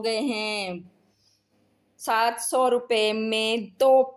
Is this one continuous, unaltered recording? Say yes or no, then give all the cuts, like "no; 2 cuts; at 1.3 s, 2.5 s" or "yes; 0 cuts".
yes; 0 cuts